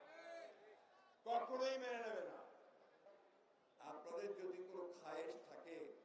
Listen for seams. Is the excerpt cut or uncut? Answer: cut